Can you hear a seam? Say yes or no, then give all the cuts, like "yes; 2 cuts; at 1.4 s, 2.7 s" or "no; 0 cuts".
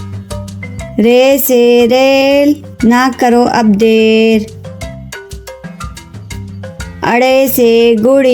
yes; 1 cut; at 0.9 s